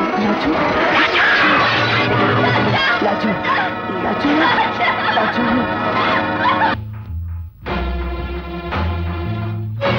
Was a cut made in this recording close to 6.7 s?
yes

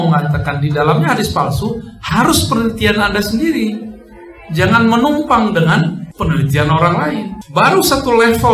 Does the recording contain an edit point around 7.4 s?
yes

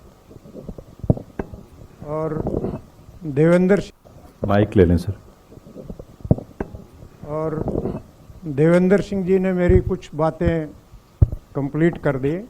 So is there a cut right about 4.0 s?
yes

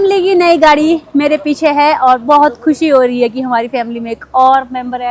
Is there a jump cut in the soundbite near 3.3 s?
no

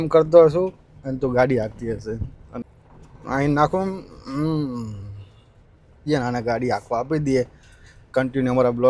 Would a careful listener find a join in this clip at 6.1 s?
yes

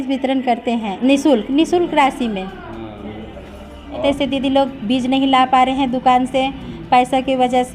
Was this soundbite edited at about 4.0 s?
yes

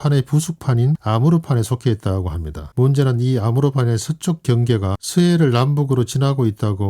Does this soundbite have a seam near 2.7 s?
yes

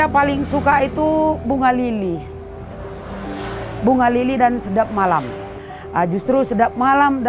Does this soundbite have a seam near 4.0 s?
no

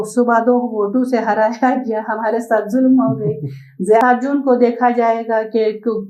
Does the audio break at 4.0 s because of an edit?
yes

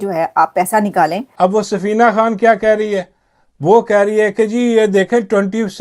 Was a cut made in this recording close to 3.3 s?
no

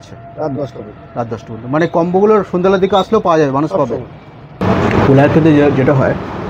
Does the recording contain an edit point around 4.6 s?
yes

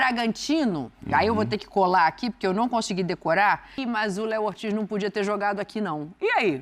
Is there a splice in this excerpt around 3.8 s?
yes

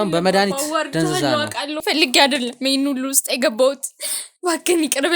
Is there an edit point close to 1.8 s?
yes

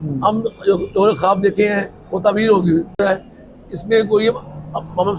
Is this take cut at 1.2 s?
no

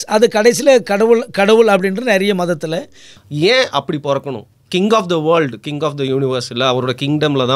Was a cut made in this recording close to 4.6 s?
no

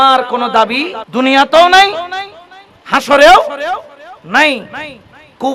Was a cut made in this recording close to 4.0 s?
no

